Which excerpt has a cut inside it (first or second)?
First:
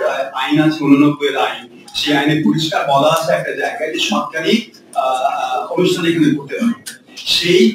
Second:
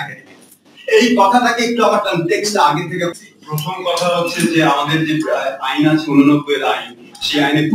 second